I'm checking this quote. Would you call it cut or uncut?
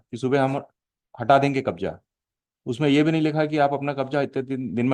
uncut